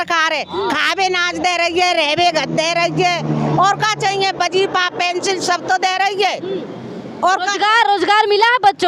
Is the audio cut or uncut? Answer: uncut